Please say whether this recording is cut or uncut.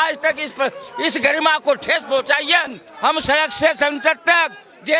cut